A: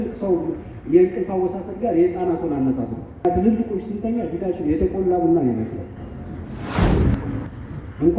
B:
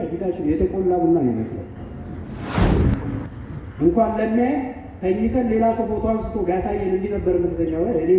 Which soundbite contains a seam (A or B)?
A